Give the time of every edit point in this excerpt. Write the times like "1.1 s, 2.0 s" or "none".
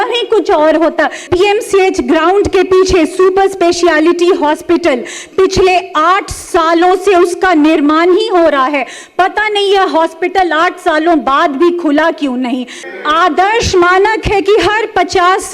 1.3 s, 12.8 s